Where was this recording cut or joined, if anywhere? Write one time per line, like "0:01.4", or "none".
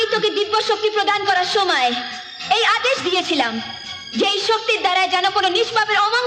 none